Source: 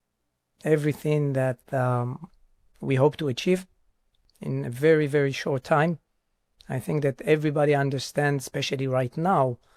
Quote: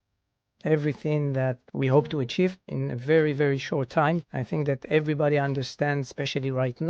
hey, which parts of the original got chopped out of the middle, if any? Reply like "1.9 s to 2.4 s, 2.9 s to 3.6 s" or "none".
1.6 s to 2.7 s, 3.8 s to 4.5 s, 6.1 s to 6.7 s